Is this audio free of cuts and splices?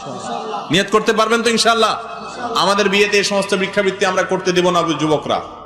yes; 0 cuts

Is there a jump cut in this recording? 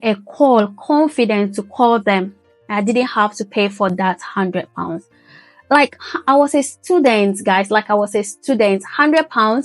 no; 0 cuts

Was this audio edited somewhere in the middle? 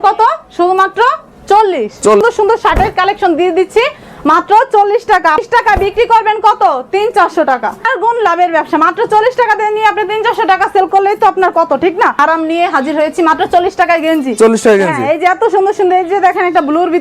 yes; 4 cuts; at 2.2 s, 5.4 s, 7.9 s, 12.2 s

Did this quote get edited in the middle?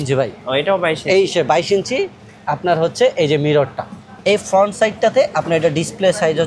yes; 1 cut; at 4.1 s

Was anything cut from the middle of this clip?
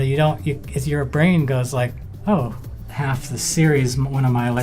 yes; 2 cuts; at 2.1 s, 2.8 s

